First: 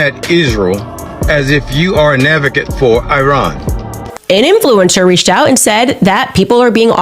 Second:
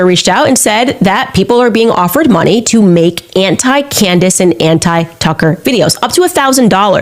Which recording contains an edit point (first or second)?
first